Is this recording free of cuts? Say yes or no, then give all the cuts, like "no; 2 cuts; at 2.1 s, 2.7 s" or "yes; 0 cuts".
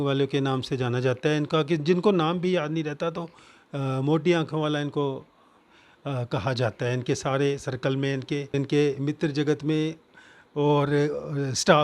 yes; 0 cuts